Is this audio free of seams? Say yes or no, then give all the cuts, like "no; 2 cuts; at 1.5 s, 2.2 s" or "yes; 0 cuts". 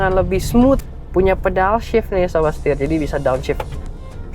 no; 1 cut; at 0.9 s